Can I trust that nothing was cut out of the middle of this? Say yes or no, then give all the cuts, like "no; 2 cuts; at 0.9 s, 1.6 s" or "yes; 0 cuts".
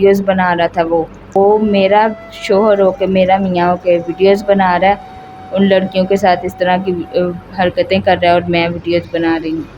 no; 1 cut; at 1.3 s